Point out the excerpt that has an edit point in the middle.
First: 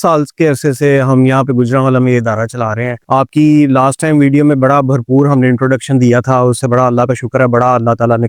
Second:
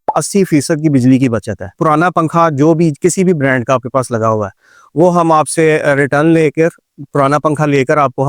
second; 1 cut; at 1.7 s

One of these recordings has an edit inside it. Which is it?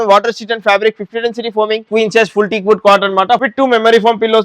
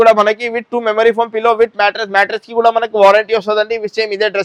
first; 2 cuts; at 1.9 s, 3.4 s

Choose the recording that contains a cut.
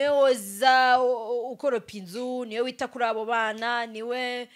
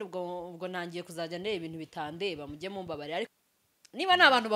second; 1 cut; at 3.3 s

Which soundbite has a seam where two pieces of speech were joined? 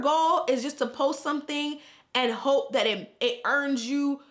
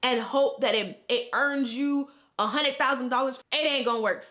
second; 1 cut; at 3.4 s

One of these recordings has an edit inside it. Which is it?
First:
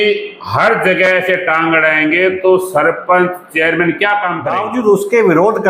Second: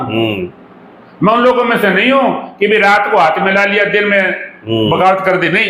first; 1 cut; at 4.4 s

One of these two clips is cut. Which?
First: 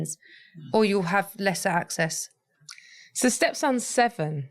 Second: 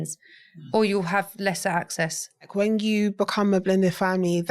second; 1 cut; at 2.5 s

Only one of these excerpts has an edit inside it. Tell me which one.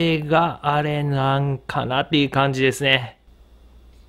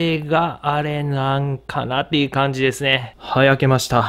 second; 1 cut; at 3.1 s

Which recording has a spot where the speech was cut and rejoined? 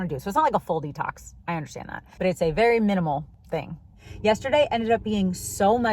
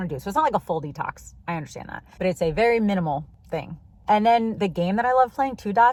first; 1 cut; at 3.9 s

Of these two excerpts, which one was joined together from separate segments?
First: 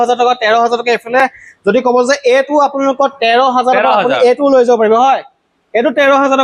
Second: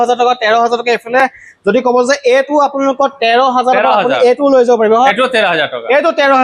second; 1 cut; at 5.1 s

